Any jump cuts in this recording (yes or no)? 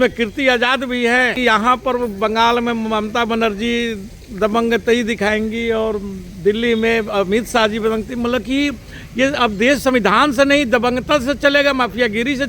yes